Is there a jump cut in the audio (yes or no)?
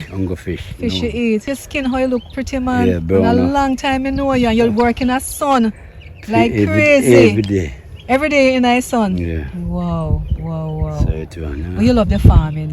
yes